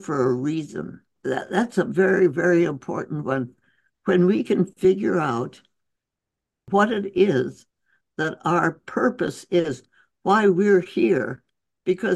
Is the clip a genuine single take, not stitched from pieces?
no; 2 cuts; at 1.1 s, 6.7 s

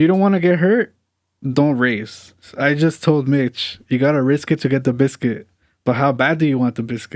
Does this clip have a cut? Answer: yes; 1 cut; at 2.5 s

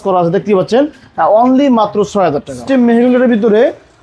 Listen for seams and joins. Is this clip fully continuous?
no; 1 cut; at 2.7 s

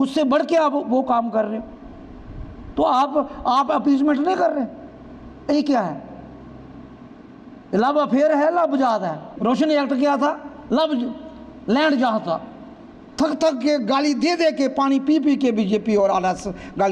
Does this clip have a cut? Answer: yes; 1 cut; at 9.3 s

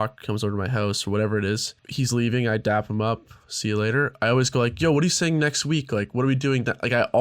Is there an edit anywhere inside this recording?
yes; 1 cut; at 1.8 s

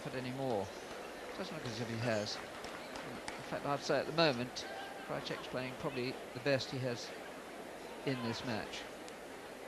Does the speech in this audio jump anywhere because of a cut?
yes; 1 cut; at 7.2 s

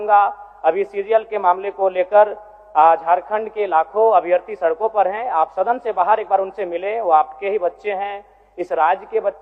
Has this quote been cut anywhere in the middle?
no; 0 cuts

